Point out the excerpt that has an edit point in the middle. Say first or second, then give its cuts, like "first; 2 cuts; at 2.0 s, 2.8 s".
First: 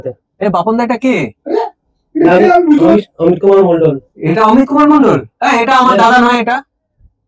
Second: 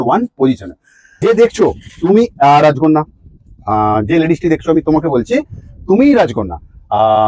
second; 1 cut; at 1.2 s